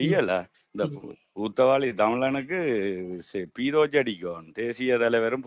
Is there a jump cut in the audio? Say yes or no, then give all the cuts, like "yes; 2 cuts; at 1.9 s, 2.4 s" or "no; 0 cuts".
no; 0 cuts